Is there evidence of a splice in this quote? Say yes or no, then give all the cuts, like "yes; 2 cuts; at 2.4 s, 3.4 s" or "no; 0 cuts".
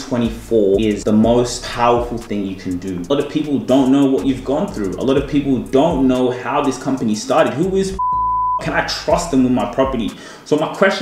yes; 3 cuts; at 0.9 s, 1.6 s, 3.1 s